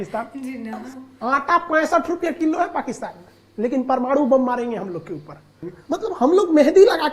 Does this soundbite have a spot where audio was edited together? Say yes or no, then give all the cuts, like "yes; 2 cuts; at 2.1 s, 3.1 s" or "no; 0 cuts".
yes; 2 cuts; at 0.9 s, 5.7 s